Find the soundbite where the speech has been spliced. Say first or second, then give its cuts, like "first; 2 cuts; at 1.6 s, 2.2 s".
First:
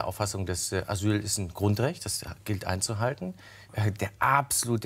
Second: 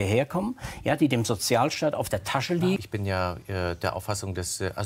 second; 1 cut; at 2.8 s